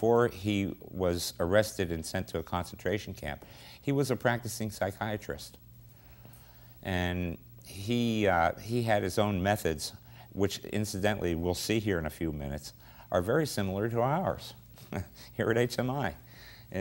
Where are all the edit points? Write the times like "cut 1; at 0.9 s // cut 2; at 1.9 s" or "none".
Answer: none